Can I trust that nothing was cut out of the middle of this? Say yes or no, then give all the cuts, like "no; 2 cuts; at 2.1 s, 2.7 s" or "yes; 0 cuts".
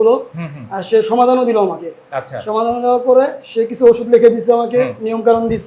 yes; 0 cuts